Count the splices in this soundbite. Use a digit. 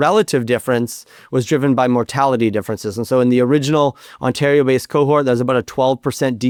0